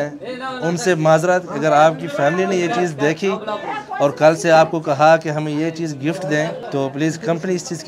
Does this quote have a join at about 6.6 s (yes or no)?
yes